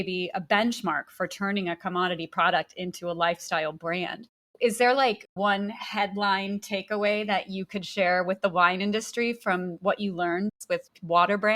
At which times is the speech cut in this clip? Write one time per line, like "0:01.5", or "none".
0:04.4
0:05.3
0:10.5